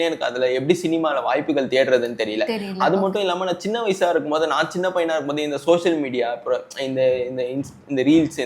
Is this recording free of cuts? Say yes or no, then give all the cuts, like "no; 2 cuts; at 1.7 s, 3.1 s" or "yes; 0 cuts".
yes; 0 cuts